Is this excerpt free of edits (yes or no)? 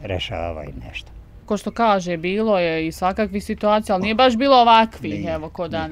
no